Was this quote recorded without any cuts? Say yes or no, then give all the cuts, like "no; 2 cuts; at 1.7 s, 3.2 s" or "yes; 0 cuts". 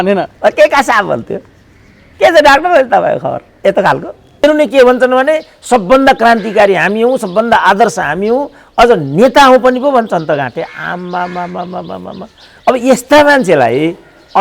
no; 1 cut; at 4.4 s